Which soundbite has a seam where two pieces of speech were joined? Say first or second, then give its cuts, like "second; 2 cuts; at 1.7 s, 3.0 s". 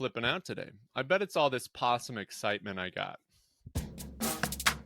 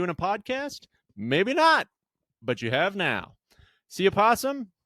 first; 1 cut; at 3.7 s